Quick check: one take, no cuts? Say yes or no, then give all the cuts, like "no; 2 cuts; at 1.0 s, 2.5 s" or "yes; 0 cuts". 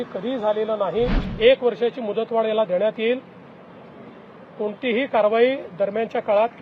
no; 1 cut; at 1.2 s